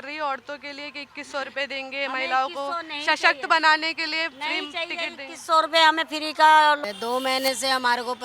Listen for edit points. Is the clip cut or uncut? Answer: cut